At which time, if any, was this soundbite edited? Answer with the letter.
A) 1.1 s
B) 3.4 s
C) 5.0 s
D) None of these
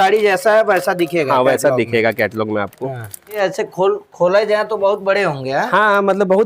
B